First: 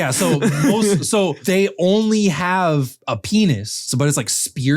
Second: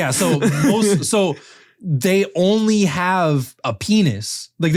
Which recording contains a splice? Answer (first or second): first